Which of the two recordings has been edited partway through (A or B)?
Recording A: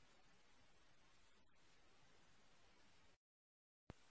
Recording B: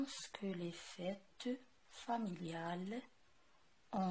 A